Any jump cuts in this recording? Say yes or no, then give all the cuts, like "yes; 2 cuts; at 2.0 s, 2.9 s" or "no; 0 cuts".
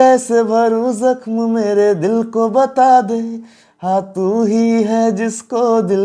no; 0 cuts